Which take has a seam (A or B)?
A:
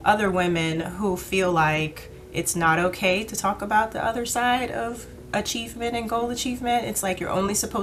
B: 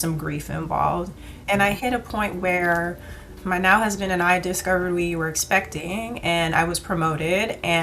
B